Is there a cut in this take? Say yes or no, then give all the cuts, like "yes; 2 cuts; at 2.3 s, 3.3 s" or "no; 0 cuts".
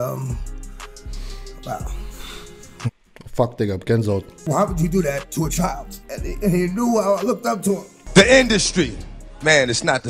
yes; 2 cuts; at 4.3 s, 7.9 s